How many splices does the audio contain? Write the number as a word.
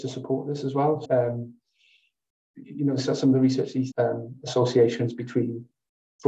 two